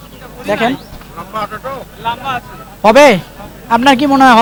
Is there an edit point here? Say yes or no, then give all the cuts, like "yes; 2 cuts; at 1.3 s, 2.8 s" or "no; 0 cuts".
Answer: no; 0 cuts